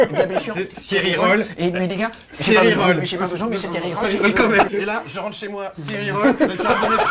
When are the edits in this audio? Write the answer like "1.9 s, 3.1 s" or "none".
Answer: 4.7 s